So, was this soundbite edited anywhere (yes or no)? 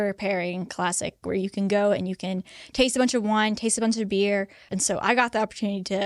yes